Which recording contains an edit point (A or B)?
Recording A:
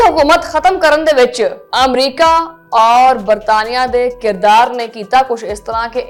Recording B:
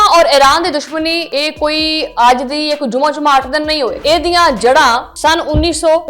B